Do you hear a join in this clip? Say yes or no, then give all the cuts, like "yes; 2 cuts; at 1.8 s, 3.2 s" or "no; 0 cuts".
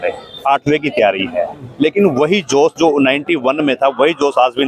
no; 0 cuts